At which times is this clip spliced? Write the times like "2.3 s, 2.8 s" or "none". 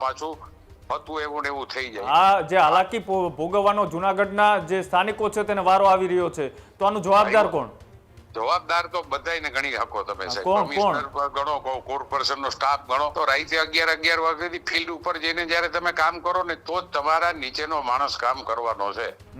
2.0 s, 13.1 s